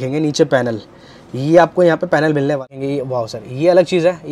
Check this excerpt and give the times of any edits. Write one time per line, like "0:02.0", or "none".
0:02.7